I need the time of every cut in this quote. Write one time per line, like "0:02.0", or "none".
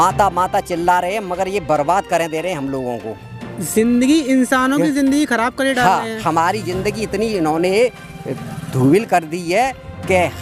none

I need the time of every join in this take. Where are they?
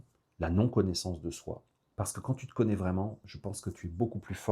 0:01.8

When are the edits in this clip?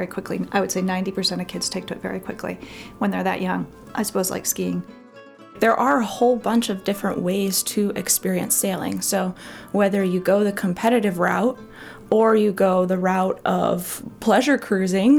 0:05.4
0:14.0

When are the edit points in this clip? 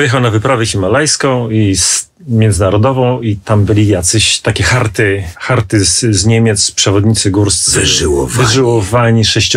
0:05.4

